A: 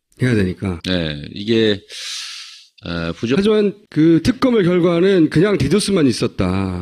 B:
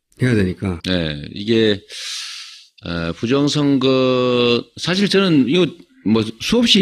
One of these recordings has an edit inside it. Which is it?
B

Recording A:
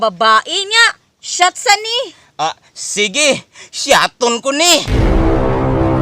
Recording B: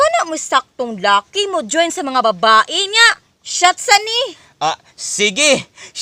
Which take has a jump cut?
A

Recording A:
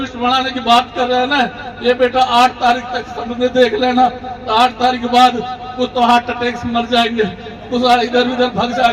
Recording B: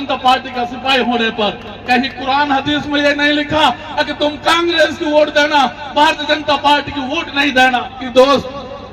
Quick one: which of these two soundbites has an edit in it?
B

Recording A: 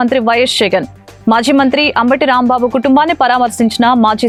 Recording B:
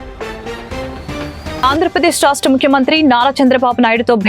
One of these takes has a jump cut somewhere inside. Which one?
B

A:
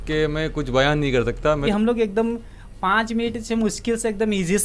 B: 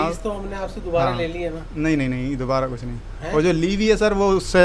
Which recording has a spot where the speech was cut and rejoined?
A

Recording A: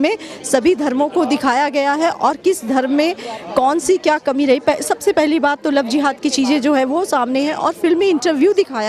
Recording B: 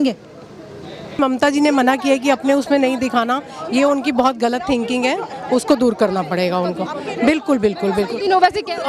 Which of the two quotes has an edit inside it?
B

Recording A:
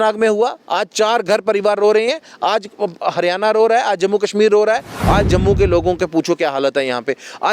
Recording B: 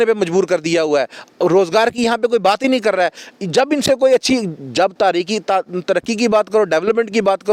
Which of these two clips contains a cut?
A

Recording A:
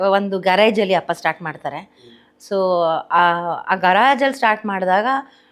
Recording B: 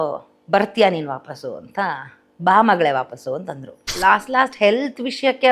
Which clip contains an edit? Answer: B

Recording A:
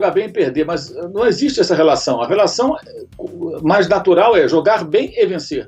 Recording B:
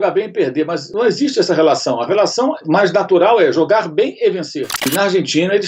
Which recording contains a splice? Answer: B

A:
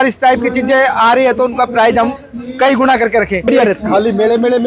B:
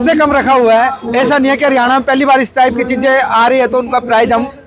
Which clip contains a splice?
A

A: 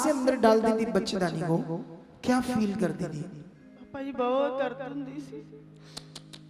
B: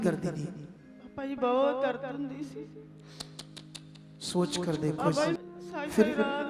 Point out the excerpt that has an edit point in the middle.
B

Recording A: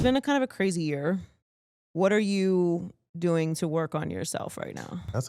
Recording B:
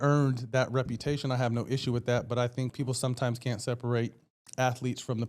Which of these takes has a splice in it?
B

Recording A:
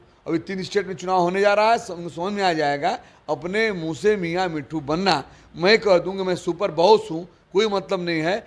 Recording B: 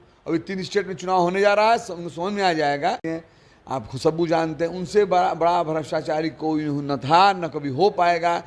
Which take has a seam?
B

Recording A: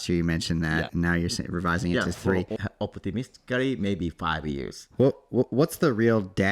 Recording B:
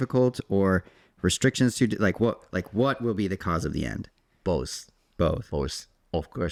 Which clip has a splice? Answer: A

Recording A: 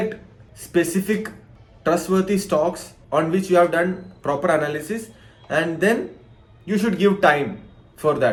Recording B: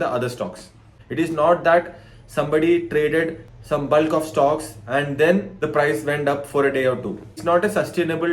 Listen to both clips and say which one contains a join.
B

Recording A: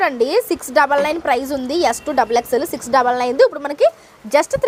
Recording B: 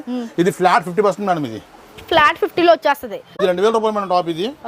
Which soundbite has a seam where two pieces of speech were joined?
B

